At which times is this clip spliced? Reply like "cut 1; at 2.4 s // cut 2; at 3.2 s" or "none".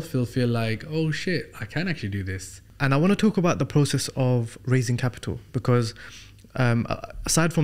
cut 1; at 2.7 s